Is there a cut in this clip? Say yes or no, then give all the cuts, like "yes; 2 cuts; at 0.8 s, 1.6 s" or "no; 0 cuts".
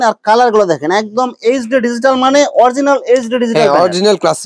no; 0 cuts